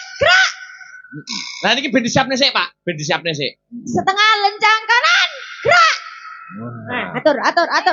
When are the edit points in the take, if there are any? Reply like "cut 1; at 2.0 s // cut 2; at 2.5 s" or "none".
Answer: none